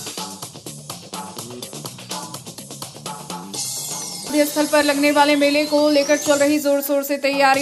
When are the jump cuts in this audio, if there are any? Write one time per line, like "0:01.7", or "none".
0:04.3